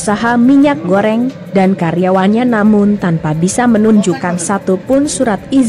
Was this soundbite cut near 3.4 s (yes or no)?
no